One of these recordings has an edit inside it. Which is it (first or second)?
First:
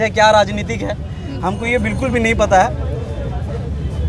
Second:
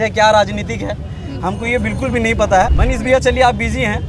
second